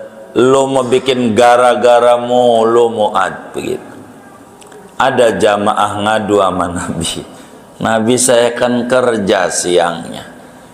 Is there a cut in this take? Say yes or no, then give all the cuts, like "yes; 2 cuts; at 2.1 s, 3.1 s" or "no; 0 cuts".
no; 0 cuts